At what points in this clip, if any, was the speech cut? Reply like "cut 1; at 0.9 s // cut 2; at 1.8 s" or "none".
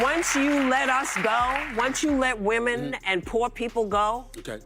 none